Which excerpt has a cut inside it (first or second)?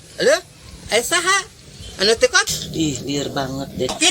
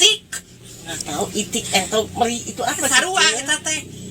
first